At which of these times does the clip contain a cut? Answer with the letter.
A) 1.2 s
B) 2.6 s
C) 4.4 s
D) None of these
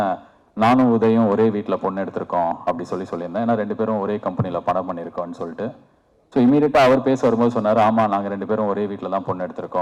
D